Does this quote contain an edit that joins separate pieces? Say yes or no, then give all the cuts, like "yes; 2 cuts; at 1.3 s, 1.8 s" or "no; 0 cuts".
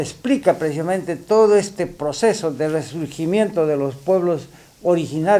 no; 0 cuts